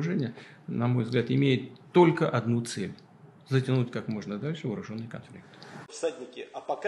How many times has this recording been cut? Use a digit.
1